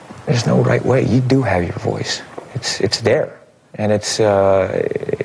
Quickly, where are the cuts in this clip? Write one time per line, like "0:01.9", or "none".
none